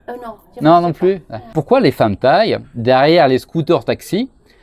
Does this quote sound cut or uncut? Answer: cut